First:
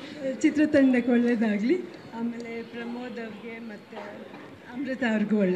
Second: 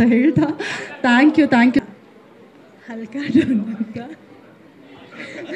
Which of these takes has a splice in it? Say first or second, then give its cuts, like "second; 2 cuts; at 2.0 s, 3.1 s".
second; 1 cut; at 1.9 s